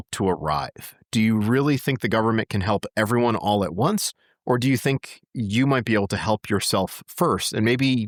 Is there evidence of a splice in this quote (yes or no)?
no